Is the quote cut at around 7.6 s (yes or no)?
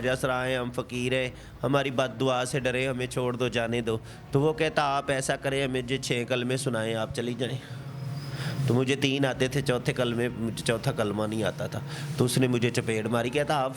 no